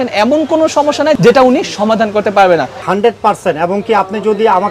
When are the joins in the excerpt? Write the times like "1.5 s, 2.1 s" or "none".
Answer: 2.8 s